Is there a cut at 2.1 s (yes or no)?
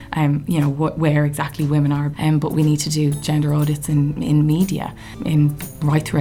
yes